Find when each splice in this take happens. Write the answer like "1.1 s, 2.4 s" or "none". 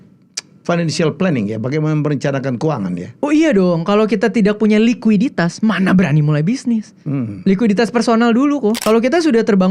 8.8 s